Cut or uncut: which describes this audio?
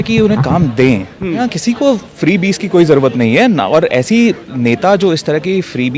cut